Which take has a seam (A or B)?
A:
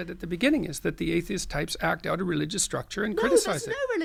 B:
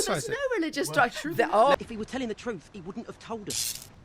B